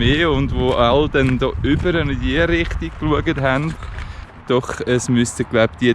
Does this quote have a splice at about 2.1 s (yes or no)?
no